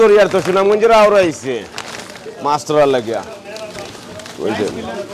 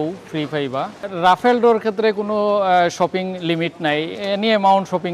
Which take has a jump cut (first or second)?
second